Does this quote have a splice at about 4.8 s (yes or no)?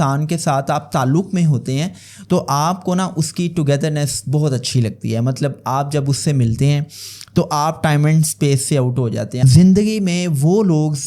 no